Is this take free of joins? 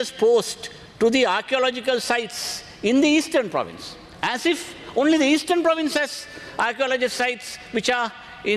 yes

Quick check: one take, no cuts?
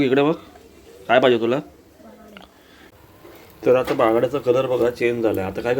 no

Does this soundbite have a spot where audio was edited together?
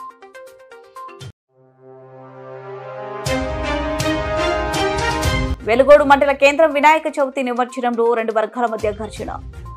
no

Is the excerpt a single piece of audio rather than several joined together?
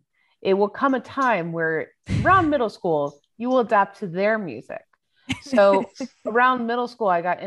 yes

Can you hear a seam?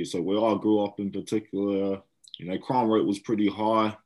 no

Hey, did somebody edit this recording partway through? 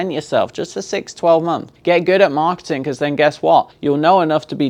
yes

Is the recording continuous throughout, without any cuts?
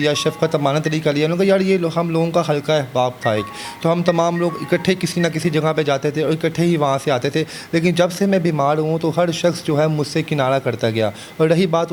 yes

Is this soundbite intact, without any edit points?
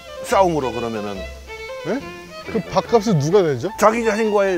no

